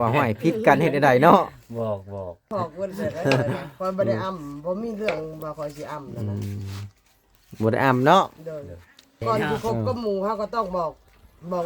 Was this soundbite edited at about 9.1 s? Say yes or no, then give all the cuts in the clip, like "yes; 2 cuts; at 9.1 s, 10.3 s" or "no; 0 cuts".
yes; 2 cuts; at 2.5 s, 9.1 s